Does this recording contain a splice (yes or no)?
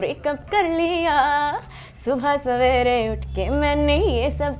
no